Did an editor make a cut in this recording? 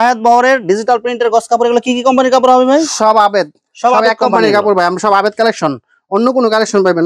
no; 0 cuts

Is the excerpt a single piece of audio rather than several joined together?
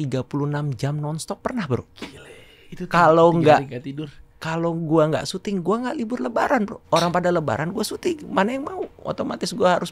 no; 2 cuts; at 6.8 s, 9.0 s

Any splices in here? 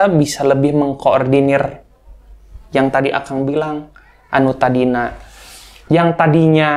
no; 0 cuts

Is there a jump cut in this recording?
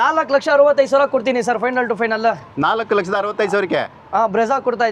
no; 0 cuts

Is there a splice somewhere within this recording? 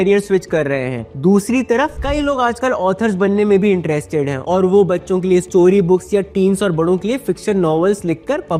no; 0 cuts

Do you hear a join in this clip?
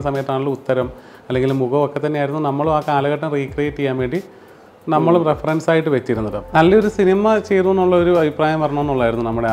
yes; 1 cut; at 6.3 s

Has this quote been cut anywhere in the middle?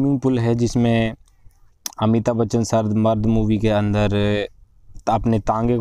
no; 0 cuts

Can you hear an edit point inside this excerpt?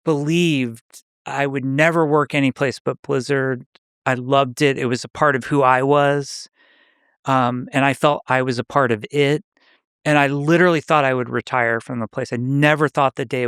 no; 0 cuts

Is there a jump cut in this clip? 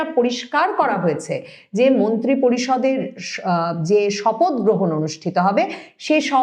no; 0 cuts

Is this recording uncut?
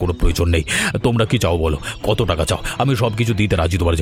yes; 0 cuts

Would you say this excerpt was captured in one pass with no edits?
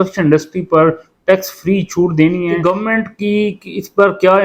no; 1 cut; at 2.6 s

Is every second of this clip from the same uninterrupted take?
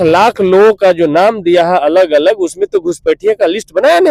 yes; 0 cuts

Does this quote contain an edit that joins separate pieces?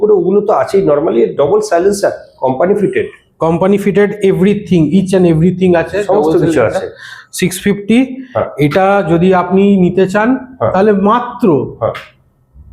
no; 0 cuts

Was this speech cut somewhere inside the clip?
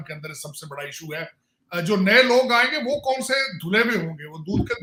no; 0 cuts

